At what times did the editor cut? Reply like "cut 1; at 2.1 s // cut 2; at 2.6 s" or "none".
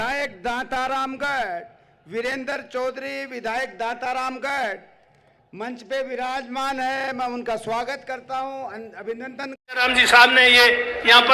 cut 1; at 9.8 s

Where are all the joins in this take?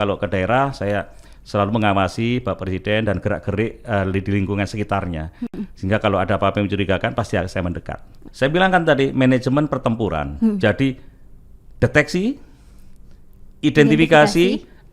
cut 1; at 8.2 s

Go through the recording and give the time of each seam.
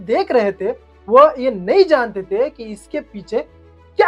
none

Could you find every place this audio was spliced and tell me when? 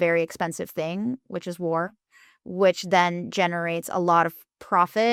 none

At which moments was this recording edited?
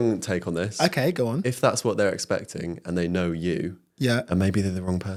none

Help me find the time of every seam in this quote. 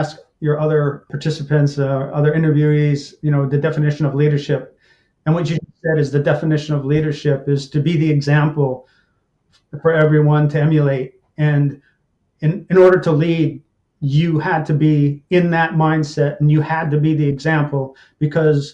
cut 1; at 1.1 s

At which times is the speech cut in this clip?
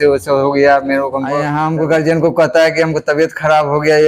cut 1; at 1.5 s

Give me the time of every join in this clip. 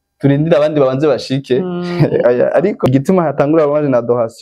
cut 1; at 2.9 s

